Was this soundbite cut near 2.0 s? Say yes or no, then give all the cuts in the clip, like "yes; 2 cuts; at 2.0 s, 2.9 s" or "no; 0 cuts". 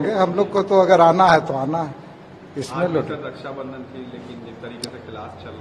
no; 0 cuts